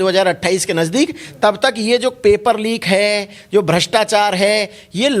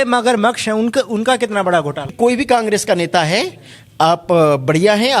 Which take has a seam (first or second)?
second